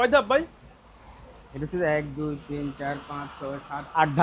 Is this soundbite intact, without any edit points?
yes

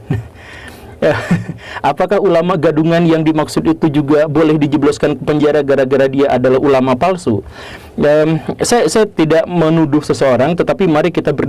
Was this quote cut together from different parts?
no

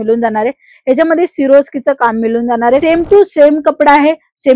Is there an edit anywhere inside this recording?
yes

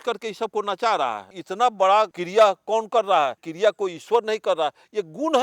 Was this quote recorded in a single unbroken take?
no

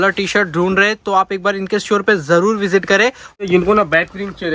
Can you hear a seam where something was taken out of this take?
yes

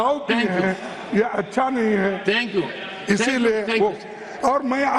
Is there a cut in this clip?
no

